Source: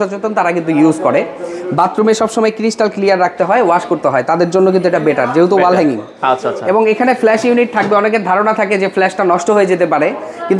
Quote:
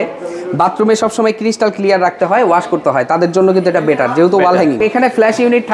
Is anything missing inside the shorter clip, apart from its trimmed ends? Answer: yes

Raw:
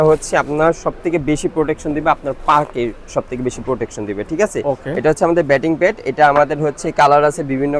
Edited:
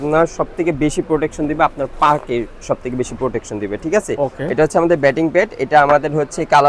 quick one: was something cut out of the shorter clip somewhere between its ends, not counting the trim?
no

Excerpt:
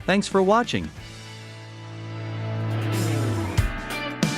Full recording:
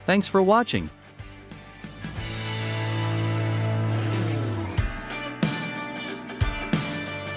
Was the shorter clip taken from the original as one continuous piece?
no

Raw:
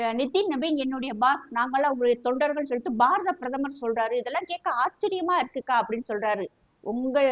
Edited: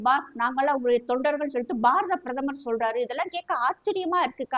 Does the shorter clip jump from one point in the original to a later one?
no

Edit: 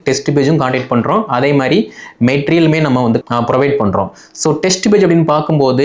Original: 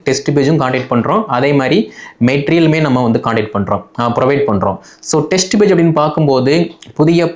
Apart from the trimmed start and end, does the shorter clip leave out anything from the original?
yes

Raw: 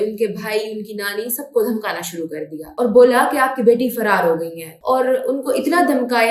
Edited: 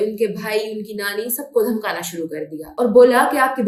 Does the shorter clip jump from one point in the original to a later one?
no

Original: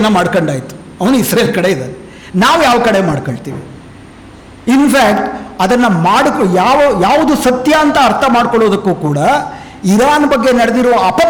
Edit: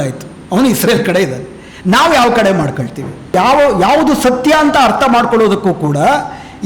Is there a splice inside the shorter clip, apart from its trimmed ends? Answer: yes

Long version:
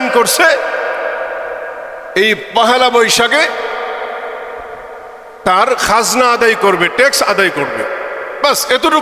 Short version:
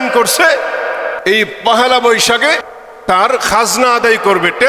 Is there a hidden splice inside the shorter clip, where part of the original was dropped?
yes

